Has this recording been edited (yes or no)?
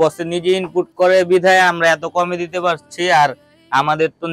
no